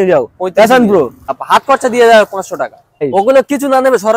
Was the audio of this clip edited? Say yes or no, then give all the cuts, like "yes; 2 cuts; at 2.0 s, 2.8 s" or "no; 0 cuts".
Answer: yes; 2 cuts; at 1.3 s, 3.1 s